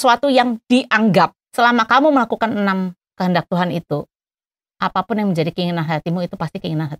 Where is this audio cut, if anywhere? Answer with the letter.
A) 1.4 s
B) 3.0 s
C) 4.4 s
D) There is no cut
A